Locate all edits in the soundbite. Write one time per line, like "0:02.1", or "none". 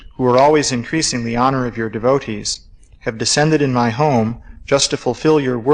none